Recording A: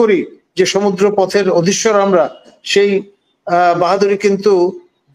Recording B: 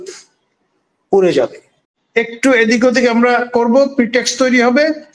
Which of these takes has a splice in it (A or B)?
B